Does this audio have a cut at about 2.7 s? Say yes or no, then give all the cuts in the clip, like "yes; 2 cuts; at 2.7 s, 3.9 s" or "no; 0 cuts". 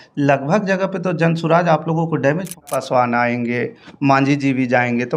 yes; 1 cut; at 2.7 s